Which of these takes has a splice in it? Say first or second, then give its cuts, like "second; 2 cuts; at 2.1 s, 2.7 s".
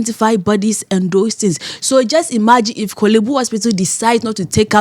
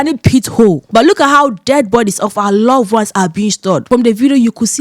second; 2 cuts; at 0.8 s, 3.9 s